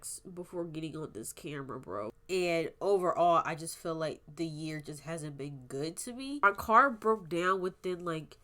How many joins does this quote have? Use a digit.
2